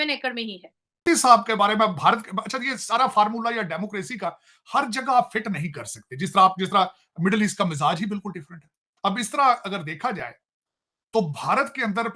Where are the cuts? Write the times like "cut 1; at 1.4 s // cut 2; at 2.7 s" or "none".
cut 1; at 1.0 s